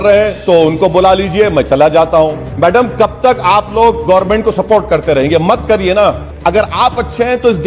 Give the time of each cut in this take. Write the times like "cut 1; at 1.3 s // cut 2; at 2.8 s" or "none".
cut 1; at 2.4 s // cut 2; at 6.3 s